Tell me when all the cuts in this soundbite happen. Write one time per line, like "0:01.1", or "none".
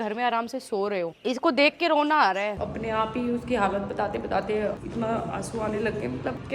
0:01.2
0:02.6